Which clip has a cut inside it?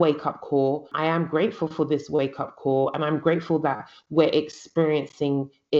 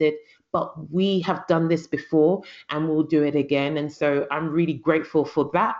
first; 1 cut; at 0.9 s

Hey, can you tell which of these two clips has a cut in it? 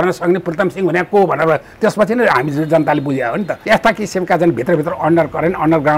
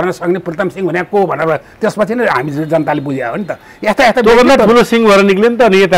first; 1 cut; at 3.6 s

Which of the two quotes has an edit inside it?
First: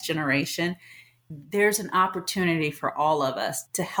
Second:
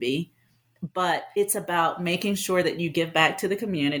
first; 1 cut; at 1.3 s

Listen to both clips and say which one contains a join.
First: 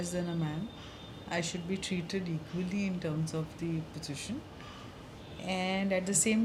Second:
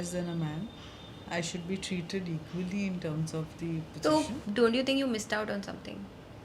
second; 1 cut; at 3.9 s

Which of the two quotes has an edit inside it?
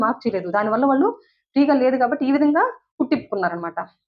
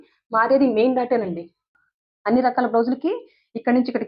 second; 1 cut; at 1.7 s

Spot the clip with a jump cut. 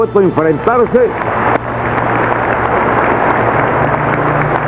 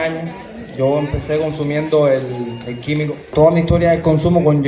second; 1 cut; at 3.3 s

